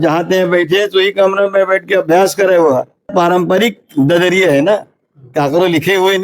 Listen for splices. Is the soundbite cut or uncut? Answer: cut